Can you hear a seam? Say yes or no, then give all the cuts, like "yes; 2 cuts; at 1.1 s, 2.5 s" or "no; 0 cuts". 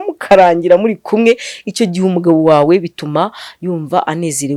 no; 0 cuts